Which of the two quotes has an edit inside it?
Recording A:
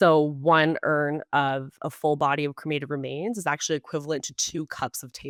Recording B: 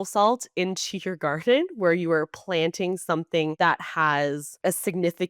B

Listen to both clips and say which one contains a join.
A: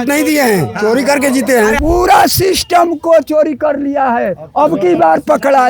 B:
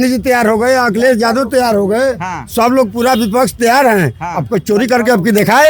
A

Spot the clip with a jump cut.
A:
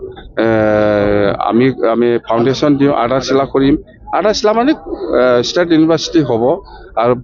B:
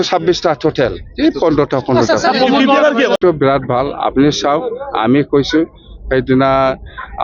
B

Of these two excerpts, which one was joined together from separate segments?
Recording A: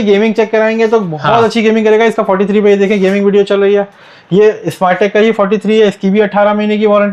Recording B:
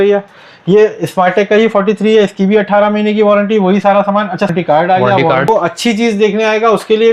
B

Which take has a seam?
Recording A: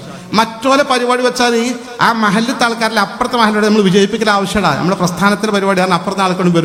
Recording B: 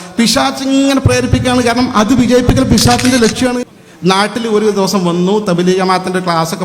B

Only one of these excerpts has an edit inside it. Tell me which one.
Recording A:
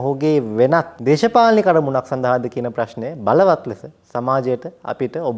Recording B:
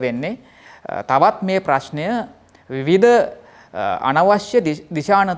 A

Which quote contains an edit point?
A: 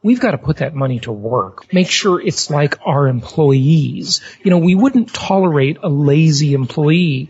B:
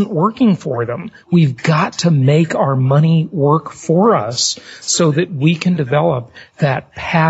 A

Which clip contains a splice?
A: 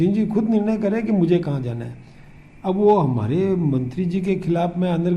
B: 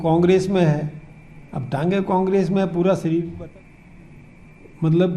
B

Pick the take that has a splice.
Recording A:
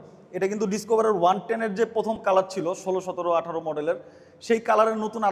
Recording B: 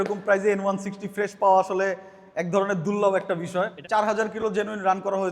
B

